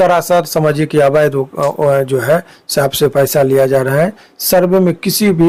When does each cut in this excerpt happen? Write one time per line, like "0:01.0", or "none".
none